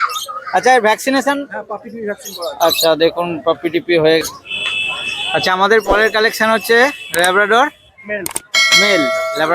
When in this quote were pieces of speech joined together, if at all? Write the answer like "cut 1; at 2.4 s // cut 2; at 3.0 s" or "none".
cut 1; at 4.2 s